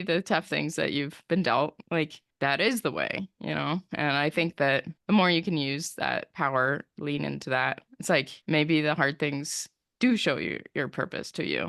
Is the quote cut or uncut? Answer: uncut